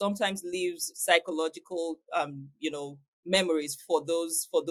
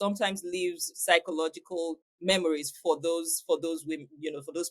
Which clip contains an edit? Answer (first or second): second